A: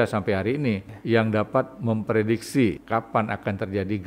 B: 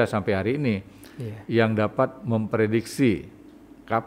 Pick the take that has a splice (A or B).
A